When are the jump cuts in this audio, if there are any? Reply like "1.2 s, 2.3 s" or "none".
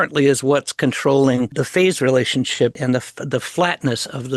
1.6 s, 2.8 s